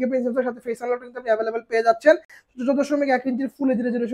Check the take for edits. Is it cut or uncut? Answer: uncut